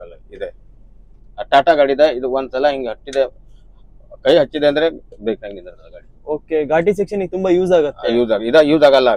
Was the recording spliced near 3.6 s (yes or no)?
no